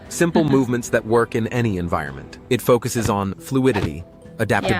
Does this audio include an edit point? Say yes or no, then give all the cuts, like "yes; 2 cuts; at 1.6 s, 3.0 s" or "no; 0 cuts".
yes; 1 cut; at 2.3 s